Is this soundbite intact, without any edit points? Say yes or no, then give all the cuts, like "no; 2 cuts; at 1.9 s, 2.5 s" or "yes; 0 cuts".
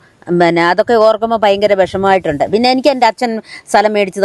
yes; 0 cuts